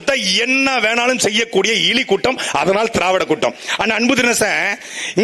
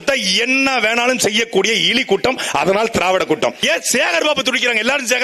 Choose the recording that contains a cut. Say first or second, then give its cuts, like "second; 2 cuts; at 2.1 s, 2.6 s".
second; 1 cut; at 3.6 s